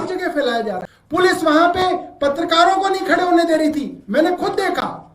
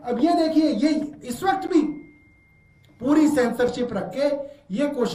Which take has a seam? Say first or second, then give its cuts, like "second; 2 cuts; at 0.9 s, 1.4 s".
first; 1 cut; at 0.9 s